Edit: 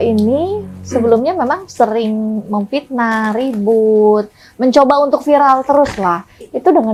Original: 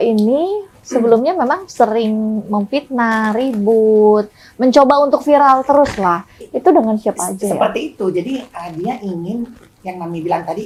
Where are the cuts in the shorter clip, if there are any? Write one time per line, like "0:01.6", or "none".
none